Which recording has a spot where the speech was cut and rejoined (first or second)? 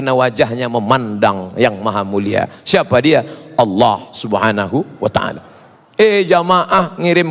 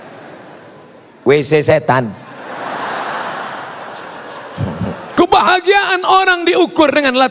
second